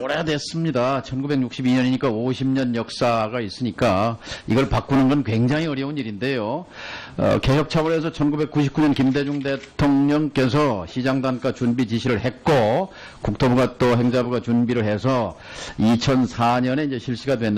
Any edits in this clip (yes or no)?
no